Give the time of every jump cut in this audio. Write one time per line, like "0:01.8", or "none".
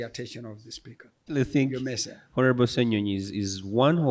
0:01.3